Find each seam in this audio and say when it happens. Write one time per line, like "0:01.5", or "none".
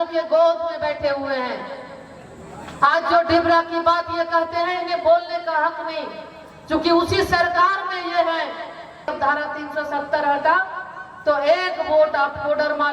0:09.1